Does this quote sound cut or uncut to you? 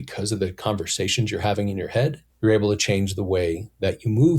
cut